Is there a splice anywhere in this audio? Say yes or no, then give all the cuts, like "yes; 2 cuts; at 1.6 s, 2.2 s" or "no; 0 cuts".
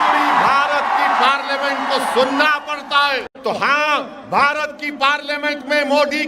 yes; 1 cut; at 3.3 s